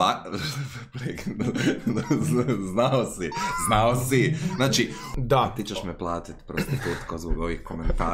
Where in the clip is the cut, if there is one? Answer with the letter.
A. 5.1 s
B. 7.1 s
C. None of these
A